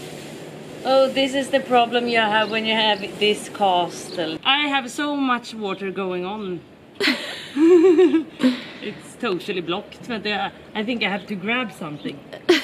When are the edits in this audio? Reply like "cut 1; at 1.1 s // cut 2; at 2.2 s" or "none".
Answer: cut 1; at 4.3 s